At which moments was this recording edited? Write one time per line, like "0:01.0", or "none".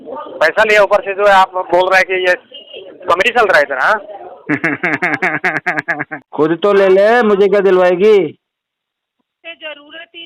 0:06.2

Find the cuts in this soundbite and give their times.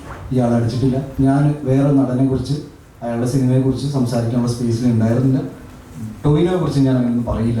0:01.1

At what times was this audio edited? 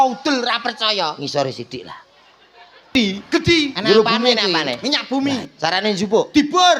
0:02.9

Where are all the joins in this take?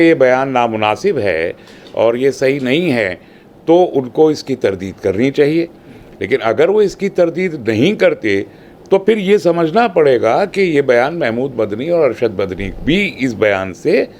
none

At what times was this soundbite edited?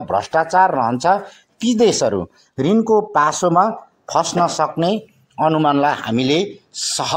none

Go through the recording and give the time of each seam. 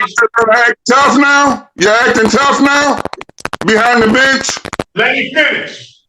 0:04.8

